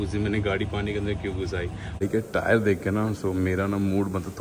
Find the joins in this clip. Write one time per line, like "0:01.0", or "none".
0:02.0